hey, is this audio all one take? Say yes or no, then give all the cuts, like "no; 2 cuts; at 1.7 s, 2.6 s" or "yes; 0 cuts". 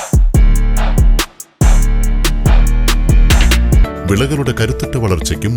no; 1 cut; at 3.9 s